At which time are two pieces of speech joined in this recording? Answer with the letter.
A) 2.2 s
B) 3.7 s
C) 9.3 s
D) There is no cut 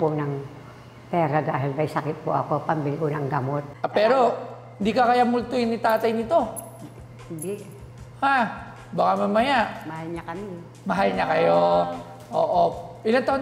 B